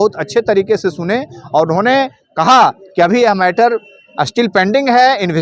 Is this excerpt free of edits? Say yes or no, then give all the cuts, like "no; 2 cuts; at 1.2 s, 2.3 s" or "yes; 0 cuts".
yes; 0 cuts